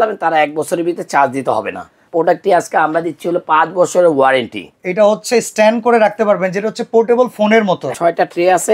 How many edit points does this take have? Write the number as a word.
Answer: three